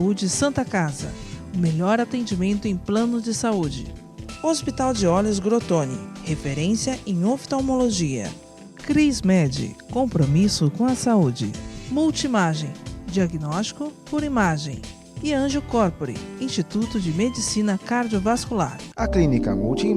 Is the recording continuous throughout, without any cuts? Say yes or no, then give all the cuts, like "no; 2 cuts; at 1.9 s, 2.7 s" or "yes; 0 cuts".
no; 1 cut; at 18.8 s